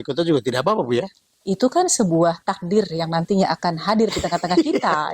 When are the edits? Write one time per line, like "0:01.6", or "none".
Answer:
none